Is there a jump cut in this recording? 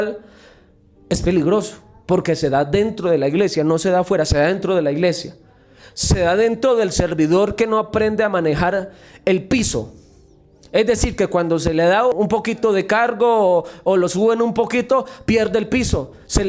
yes; 1 cut; at 12.1 s

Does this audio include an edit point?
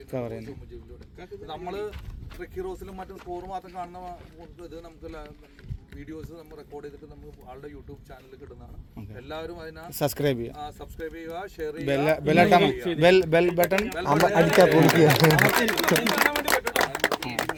no; 0 cuts

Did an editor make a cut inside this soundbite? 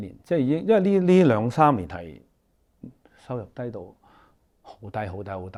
no; 0 cuts

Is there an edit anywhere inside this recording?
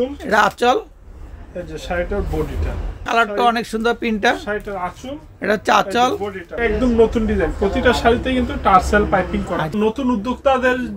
yes; 3 cuts; at 3.0 s, 6.5 s, 9.7 s

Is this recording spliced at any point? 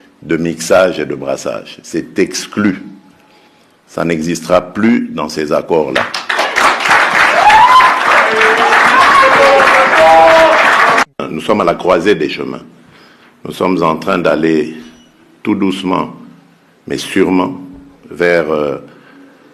yes; 1 cut; at 11.2 s

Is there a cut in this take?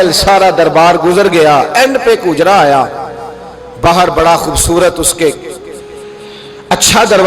no; 0 cuts

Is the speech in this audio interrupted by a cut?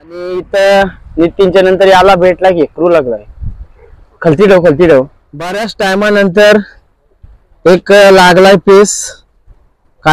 yes; 1 cut; at 5.7 s

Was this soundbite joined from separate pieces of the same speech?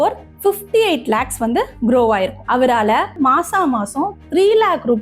yes; 1 cut; at 3.1 s

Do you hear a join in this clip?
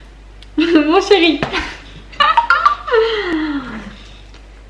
no; 0 cuts

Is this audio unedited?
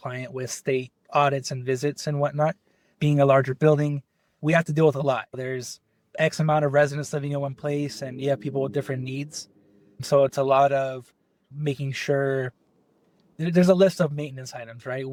yes; 0 cuts

